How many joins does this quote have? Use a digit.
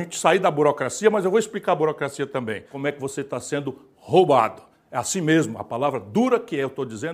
1